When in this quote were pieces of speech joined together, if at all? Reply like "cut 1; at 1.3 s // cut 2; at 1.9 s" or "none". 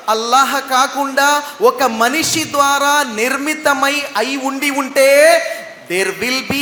none